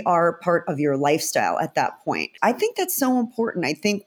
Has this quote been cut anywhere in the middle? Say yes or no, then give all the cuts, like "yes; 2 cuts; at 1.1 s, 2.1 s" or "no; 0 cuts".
yes; 1 cut; at 2.3 s